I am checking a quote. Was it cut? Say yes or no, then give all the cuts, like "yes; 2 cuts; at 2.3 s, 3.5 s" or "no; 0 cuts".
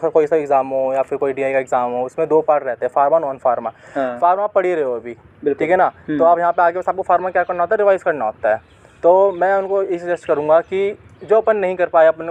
no; 0 cuts